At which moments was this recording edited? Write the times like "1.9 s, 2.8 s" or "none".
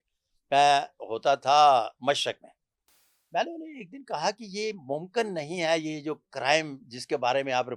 none